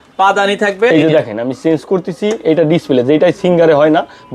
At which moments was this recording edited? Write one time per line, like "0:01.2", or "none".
0:00.9